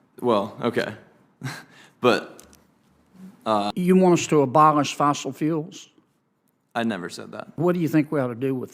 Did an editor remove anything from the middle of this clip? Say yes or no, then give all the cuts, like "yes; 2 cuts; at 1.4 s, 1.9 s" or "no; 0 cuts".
yes; 2 cuts; at 3.7 s, 7.6 s